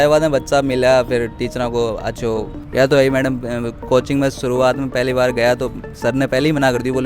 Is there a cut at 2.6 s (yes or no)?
yes